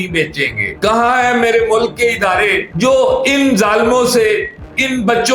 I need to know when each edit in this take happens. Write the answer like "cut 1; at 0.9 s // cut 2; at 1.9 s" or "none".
none